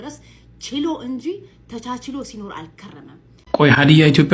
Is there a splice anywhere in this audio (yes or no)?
yes